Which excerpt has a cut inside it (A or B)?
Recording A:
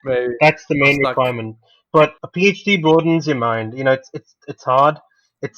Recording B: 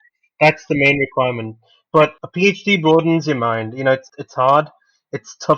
B